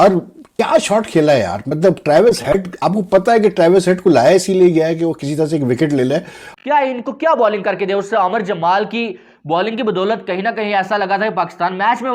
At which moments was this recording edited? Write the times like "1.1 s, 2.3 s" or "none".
6.4 s

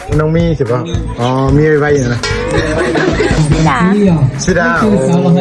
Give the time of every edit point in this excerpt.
3.4 s

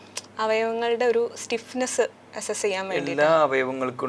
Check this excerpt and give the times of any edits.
none

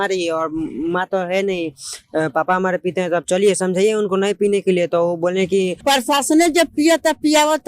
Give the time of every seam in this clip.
5.8 s

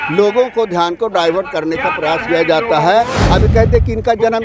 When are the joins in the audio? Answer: 3.2 s

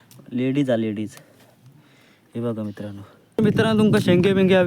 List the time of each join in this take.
3.4 s

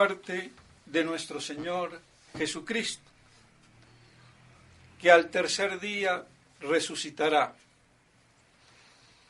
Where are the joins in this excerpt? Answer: 5.1 s

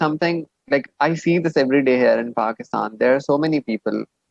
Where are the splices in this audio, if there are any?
none

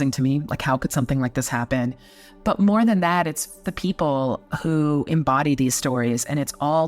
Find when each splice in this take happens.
1.7 s, 3.7 s

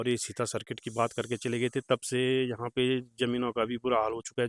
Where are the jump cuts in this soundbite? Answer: none

